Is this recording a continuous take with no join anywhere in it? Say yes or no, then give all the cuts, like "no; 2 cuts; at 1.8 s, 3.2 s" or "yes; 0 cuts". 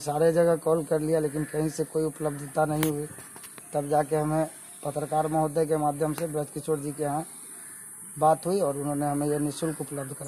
yes; 0 cuts